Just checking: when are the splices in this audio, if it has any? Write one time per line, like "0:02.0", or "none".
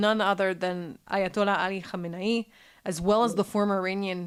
none